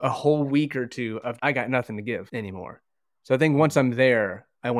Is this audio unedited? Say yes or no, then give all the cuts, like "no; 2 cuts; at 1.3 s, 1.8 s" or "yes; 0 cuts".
yes; 0 cuts